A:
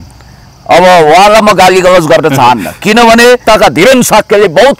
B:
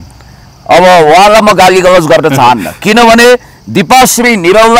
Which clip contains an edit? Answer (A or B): A